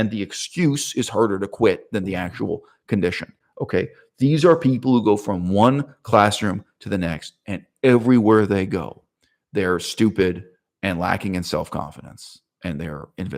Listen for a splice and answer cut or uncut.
uncut